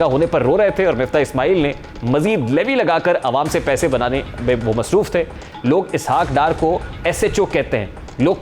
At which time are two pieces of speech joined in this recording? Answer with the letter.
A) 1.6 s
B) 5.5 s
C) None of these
B